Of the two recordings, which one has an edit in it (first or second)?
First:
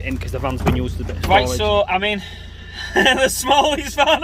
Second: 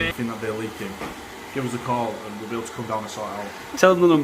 first